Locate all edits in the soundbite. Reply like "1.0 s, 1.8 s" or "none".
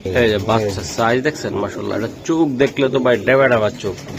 none